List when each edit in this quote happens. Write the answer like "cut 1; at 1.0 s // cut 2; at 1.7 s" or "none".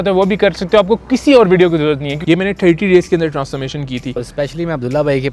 cut 1; at 2.2 s // cut 2; at 4.1 s